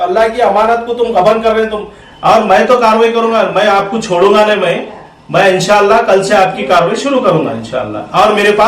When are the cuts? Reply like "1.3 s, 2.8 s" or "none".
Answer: 1.9 s